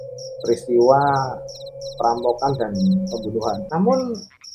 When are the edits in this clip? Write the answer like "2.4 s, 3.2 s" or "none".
3.6 s